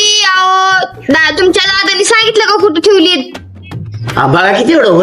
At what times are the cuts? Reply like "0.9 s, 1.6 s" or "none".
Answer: 3.9 s